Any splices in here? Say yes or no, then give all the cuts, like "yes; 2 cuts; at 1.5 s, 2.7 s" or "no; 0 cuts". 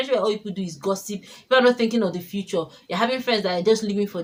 no; 0 cuts